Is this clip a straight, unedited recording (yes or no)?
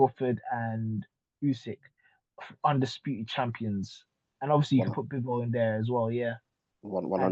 yes